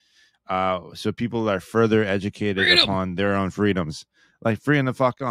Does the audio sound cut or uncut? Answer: uncut